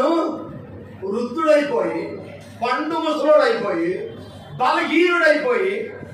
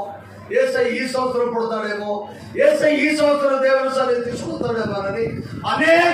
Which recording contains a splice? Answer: second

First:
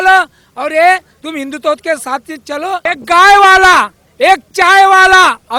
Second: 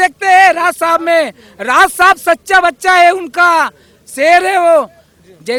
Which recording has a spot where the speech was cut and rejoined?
first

